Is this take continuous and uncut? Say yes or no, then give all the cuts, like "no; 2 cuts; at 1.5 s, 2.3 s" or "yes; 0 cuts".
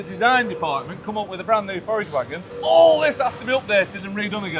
no; 1 cut; at 2.4 s